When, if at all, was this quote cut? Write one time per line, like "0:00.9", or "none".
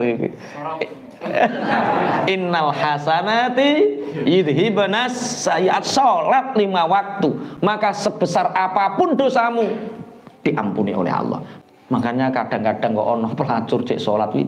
0:11.5